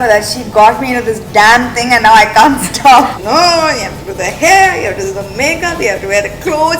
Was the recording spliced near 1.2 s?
no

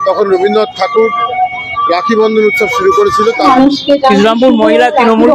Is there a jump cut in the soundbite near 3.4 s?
yes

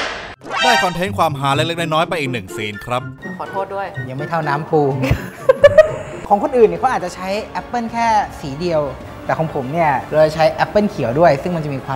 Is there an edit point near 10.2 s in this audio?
no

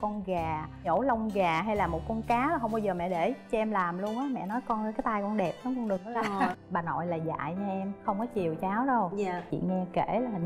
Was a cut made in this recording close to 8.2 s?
no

